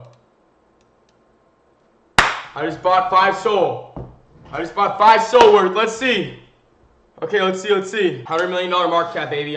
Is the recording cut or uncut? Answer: cut